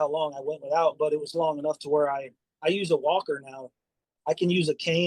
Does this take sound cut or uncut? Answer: cut